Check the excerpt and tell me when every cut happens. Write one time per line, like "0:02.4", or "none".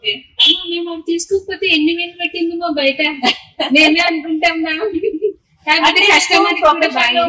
none